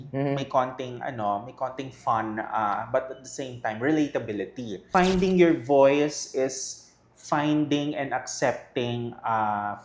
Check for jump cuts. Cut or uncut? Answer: cut